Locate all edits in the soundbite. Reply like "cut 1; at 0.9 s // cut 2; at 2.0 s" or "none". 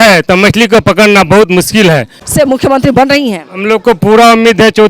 cut 1; at 2.2 s